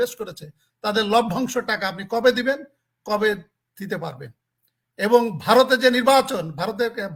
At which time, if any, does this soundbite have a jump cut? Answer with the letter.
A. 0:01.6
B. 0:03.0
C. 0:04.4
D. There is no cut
D